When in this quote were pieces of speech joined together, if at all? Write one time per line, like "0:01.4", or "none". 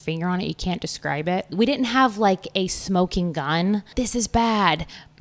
0:01.5
0:03.9